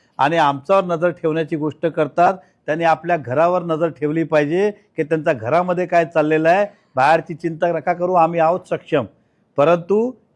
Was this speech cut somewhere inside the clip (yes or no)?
no